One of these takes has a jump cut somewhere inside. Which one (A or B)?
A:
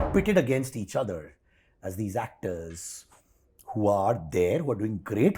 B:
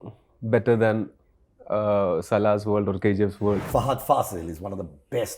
B